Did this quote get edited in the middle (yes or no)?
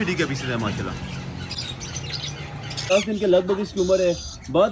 yes